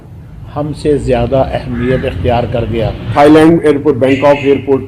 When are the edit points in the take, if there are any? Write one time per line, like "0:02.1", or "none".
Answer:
0:03.0